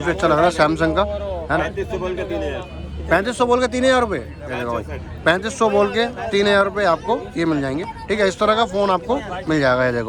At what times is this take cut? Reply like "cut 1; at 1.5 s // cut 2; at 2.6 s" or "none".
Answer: none